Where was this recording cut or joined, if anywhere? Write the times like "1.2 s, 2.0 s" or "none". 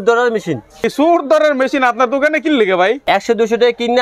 0.9 s, 3.0 s